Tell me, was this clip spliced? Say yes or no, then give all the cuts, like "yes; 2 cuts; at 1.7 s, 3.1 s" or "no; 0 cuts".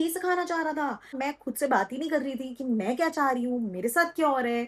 yes; 1 cut; at 1.2 s